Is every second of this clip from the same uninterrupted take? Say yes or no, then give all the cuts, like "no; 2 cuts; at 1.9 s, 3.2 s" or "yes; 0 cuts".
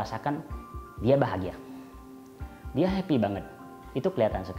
yes; 0 cuts